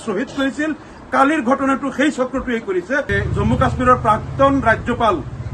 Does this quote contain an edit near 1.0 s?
no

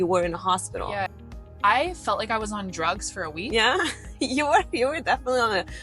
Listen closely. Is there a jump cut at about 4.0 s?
no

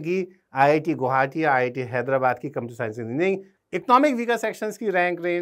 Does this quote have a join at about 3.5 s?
yes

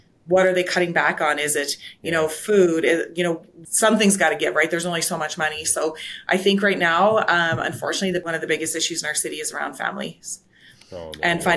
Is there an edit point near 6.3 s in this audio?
no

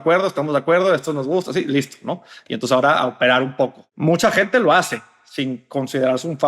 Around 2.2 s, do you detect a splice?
no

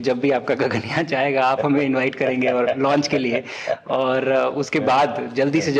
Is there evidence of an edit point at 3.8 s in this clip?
no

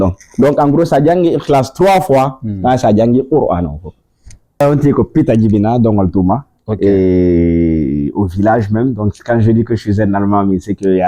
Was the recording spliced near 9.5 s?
no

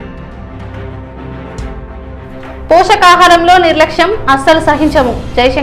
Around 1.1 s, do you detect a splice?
no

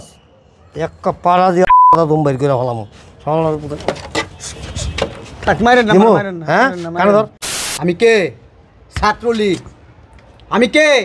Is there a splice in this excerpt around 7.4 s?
yes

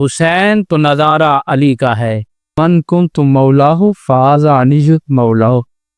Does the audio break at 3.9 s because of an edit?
no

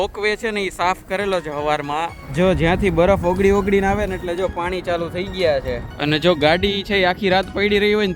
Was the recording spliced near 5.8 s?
yes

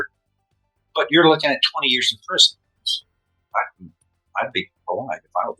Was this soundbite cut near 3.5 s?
yes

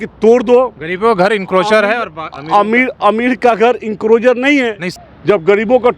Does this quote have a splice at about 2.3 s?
no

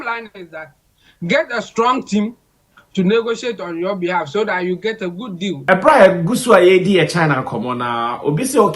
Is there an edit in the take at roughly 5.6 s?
yes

